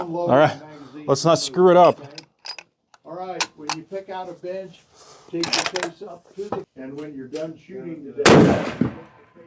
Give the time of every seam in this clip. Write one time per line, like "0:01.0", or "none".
0:06.2